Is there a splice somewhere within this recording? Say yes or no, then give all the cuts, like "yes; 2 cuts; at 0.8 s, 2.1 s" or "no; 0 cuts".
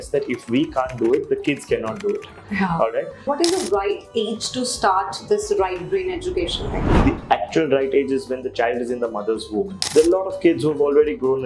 yes; 3 cuts; at 3.3 s, 6.8 s, 9.8 s